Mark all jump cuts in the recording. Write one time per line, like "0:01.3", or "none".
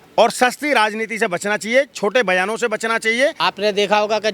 0:03.4